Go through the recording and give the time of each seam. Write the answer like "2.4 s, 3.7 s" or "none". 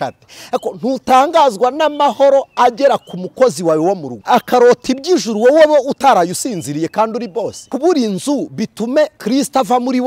4.1 s, 7.6 s, 9.2 s